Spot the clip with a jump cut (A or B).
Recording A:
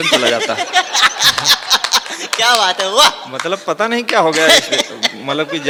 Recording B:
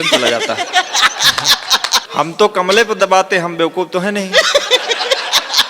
B